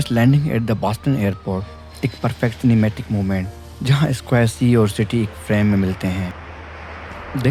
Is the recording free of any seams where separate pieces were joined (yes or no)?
yes